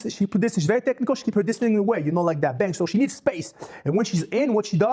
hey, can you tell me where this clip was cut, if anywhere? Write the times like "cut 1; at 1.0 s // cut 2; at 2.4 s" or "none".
none

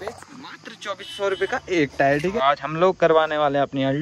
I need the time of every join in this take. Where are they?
cut 1; at 2.4 s

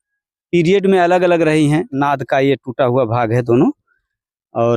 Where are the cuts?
cut 1; at 2.0 s

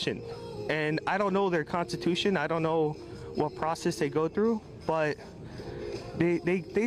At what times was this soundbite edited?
none

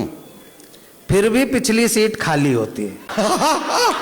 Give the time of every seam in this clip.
cut 1; at 3.0 s

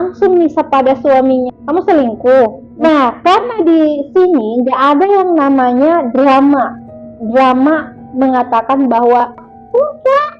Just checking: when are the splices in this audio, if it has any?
cut 1; at 1.5 s // cut 2; at 2.8 s

